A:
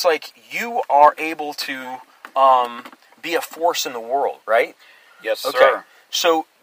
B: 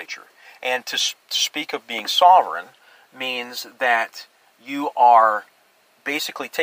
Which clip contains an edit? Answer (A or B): A